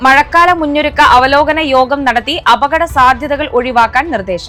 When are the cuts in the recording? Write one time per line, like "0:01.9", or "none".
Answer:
none